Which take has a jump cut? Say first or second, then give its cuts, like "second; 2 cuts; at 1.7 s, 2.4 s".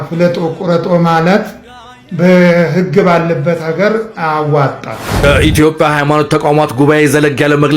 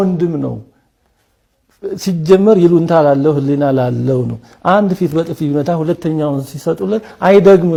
first; 1 cut; at 5.1 s